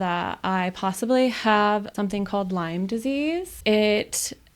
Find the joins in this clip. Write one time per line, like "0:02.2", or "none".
0:01.9
0:03.5